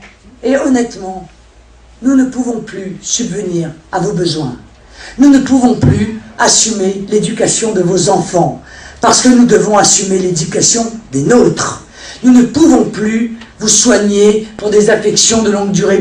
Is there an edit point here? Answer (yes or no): no